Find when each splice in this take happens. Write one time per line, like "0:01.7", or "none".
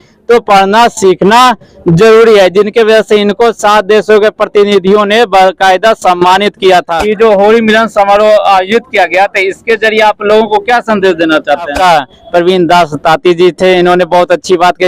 0:07.0
0:11.7